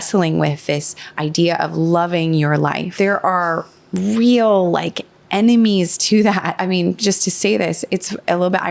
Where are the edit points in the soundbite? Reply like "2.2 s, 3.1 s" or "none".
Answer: 2.8 s, 6.5 s